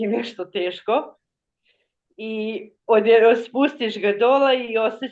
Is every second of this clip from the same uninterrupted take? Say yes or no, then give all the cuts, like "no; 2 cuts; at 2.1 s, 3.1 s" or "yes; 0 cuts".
yes; 0 cuts